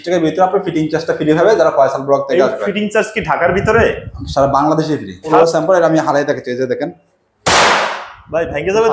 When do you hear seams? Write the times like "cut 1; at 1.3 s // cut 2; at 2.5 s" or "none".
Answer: cut 1; at 5.3 s

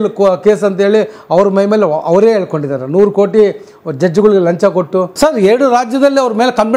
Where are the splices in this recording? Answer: cut 1; at 5.1 s

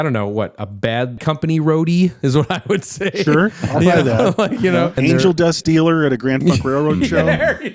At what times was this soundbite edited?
cut 1; at 1.2 s // cut 2; at 5.0 s

